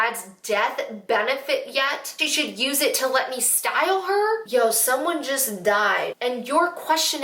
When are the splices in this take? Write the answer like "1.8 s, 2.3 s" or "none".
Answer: none